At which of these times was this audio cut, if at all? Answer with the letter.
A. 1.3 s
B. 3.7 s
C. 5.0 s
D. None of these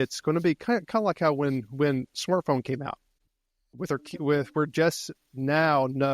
B